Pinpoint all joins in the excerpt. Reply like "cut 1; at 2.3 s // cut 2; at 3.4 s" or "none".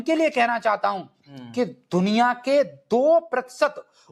none